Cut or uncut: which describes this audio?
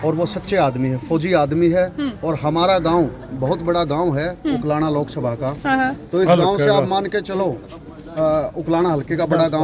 uncut